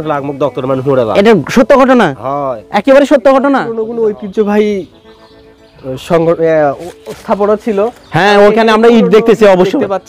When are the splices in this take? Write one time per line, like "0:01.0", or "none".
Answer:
0:03.8